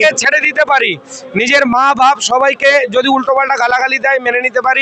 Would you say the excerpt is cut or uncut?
uncut